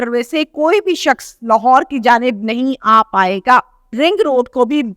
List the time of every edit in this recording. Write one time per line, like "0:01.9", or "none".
0:03.9